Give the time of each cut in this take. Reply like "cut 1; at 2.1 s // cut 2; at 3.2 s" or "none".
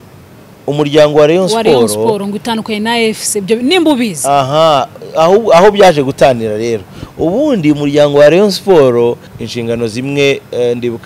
cut 1; at 9.3 s